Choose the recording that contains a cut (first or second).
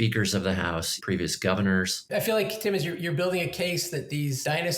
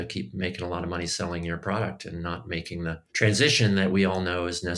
first